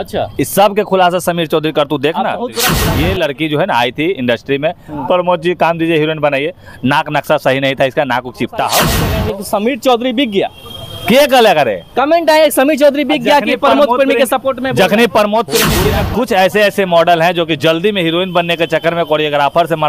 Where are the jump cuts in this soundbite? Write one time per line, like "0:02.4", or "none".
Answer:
0:02.7
0:09.0
0:15.8

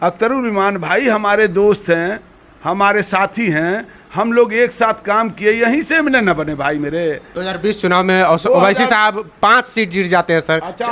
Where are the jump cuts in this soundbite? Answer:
0:07.3

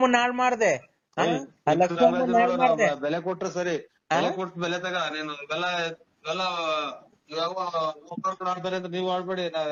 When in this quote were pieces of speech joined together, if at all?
none

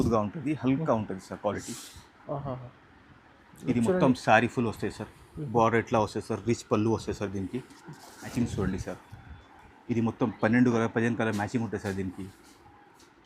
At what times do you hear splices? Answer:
0:08.3

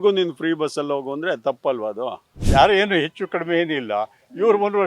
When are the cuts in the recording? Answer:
0:02.3

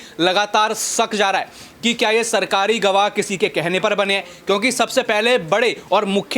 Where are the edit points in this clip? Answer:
none

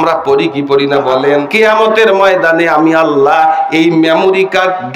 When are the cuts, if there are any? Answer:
0:01.5

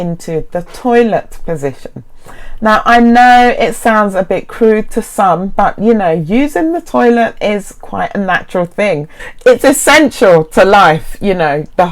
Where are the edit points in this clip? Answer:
0:09.2

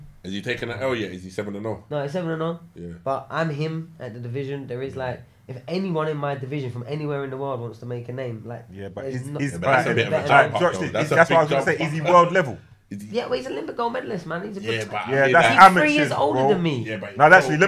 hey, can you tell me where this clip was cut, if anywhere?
none

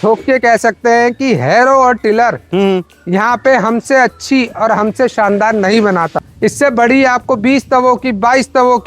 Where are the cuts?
0:06.2

